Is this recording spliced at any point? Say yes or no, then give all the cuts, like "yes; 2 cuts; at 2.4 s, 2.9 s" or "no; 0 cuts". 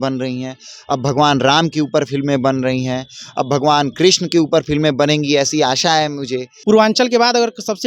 yes; 1 cut; at 6.5 s